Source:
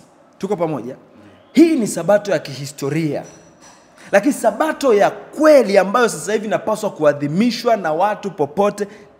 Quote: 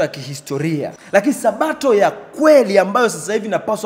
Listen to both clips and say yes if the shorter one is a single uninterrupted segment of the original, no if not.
no